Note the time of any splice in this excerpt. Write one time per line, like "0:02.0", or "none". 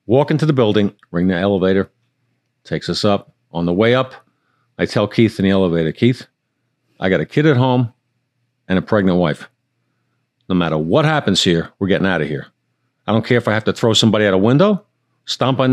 none

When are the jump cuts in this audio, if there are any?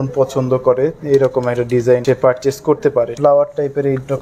0:02.0
0:03.1

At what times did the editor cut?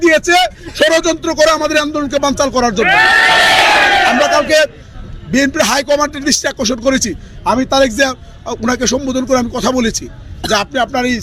none

